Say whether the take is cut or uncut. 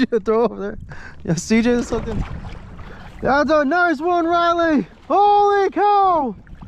cut